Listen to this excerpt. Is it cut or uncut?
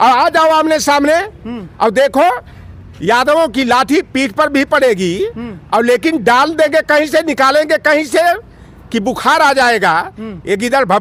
uncut